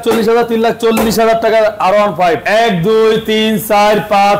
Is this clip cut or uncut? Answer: cut